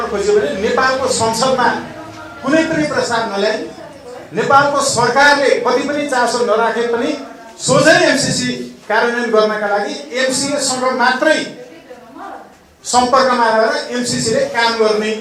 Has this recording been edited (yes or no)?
no